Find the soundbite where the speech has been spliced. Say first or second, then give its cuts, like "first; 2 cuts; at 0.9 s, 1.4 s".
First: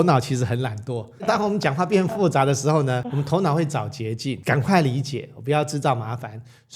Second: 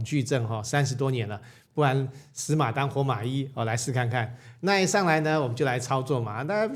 first; 3 cuts; at 1.2 s, 3.1 s, 4.4 s